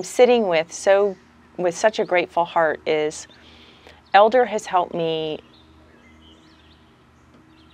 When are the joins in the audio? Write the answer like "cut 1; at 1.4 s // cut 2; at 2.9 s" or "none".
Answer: none